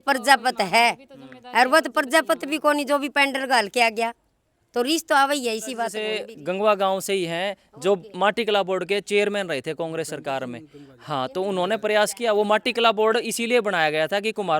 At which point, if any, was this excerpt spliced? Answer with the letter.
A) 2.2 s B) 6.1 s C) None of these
B